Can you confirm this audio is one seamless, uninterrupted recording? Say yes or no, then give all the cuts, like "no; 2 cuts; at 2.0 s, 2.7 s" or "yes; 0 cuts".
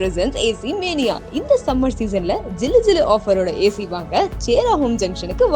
yes; 0 cuts